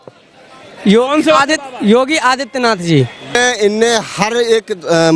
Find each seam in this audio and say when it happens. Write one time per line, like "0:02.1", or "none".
0:03.3